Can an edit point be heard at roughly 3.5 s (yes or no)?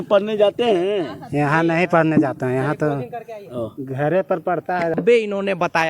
no